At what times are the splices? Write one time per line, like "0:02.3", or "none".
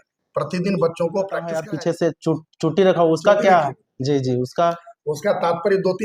0:01.6